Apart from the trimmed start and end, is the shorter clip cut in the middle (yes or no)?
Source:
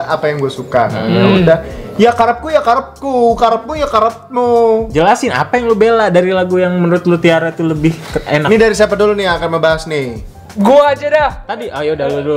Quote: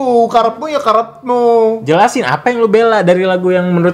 no